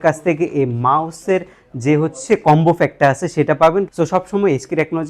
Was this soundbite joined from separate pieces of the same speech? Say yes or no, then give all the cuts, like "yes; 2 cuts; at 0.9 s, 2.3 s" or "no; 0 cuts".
yes; 1 cut; at 3.9 s